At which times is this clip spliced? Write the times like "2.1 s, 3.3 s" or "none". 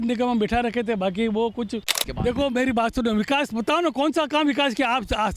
2.0 s

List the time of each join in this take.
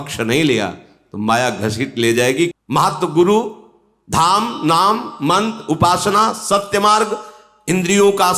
2.5 s

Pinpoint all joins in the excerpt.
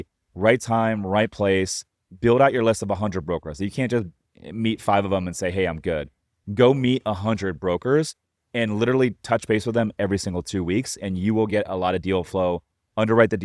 none

